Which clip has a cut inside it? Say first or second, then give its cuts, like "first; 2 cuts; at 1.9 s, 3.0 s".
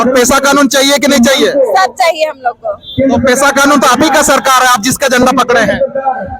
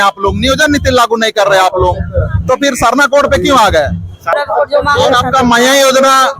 second; 1 cut; at 4.3 s